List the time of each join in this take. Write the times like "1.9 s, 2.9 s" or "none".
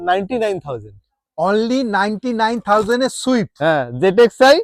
none